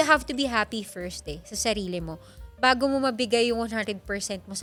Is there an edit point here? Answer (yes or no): no